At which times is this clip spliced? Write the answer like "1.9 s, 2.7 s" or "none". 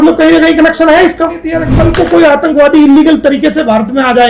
1.6 s

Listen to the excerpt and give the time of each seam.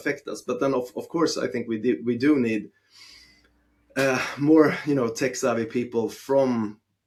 none

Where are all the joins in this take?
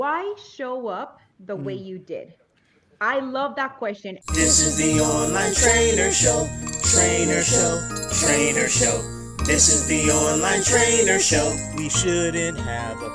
4.2 s

